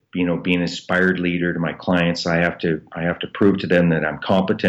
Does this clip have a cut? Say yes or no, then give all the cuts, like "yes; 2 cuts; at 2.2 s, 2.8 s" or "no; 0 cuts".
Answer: no; 0 cuts